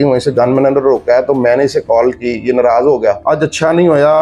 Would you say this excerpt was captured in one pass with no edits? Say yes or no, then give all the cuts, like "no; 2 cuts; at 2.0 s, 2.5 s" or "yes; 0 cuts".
no; 1 cut; at 3.2 s